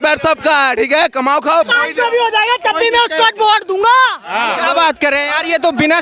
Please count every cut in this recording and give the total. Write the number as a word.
one